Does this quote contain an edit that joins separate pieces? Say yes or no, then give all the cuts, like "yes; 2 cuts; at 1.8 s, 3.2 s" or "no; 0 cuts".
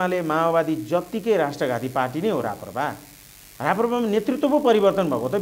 no; 0 cuts